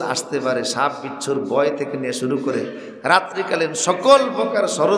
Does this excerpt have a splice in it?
no; 0 cuts

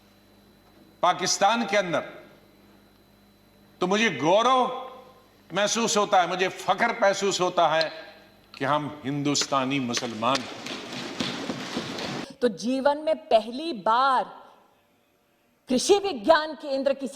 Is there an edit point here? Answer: yes; 1 cut; at 12.2 s

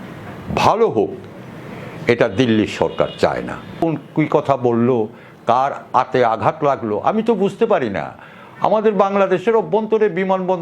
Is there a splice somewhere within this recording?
yes; 1 cut; at 3.8 s

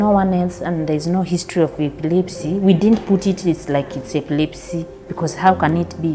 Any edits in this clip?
no; 0 cuts

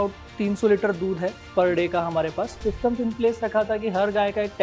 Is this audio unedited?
no; 1 cut; at 2.6 s

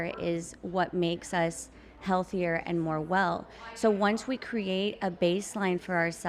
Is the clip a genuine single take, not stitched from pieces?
yes; 0 cuts

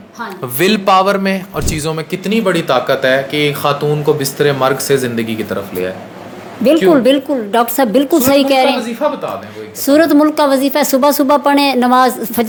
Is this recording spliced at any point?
no; 0 cuts

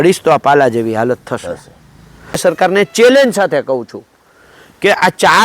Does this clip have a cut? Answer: yes; 1 cut; at 2.4 s

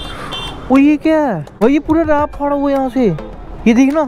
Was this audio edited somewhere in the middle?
yes; 1 cut; at 1.5 s

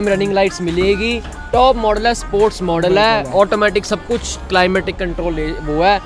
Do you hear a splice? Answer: no; 0 cuts

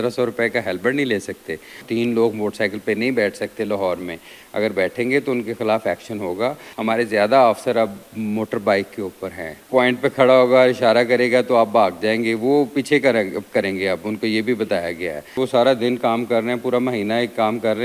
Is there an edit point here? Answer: yes; 4 cuts; at 1.8 s, 6.7 s, 9.7 s, 15.4 s

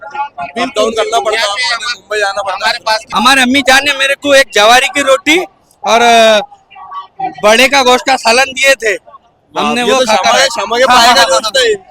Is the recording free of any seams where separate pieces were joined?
no; 1 cut; at 3.1 s

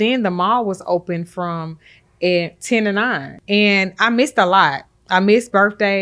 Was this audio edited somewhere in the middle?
yes; 1 cut; at 3.3 s

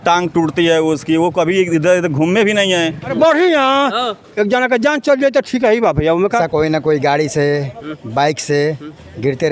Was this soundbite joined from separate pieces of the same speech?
yes; 2 cuts; at 3.1 s, 6.4 s

